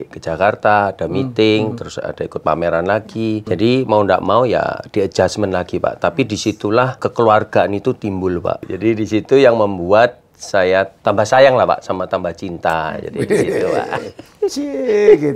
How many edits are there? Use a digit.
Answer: 4